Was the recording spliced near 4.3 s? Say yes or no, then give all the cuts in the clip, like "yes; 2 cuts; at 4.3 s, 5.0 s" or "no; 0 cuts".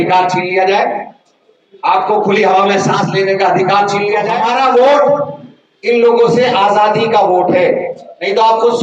yes; 1 cut; at 4.3 s